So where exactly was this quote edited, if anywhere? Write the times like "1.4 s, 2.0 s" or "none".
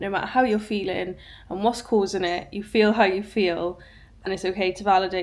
none